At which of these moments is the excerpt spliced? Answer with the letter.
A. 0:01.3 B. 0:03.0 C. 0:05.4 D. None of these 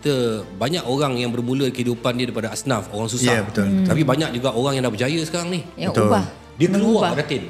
D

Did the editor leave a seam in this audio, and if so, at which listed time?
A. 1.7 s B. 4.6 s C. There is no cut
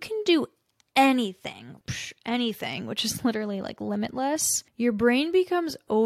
A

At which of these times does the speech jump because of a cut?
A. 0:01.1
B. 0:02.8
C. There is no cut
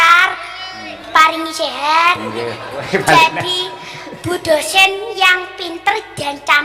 A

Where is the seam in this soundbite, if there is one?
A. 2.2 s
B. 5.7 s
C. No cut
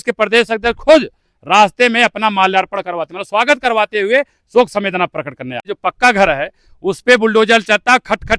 B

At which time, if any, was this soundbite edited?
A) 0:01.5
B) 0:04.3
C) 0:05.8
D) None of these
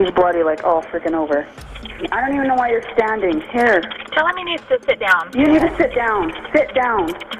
A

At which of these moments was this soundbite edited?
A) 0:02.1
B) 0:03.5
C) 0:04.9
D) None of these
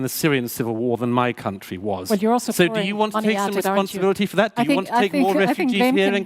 A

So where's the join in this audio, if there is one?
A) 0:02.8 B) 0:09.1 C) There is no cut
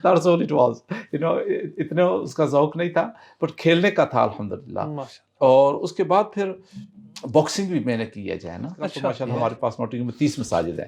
B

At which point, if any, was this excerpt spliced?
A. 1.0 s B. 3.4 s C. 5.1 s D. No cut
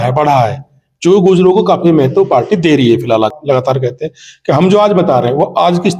B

